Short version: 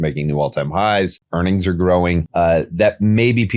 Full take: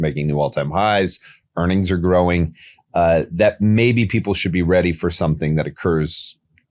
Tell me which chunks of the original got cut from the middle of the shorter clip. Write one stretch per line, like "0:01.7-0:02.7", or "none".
0:01.2-0:01.5
0:02.5-0:02.8